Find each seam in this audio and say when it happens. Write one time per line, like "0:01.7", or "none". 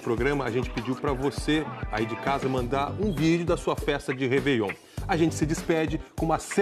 0:05.4